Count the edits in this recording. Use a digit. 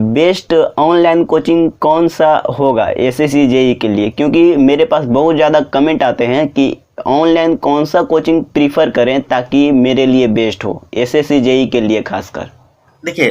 0